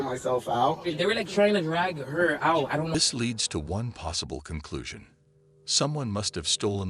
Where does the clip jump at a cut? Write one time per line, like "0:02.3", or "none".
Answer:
0:02.9